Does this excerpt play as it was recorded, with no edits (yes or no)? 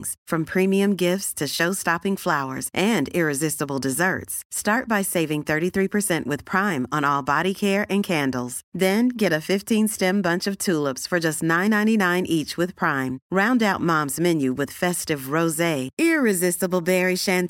yes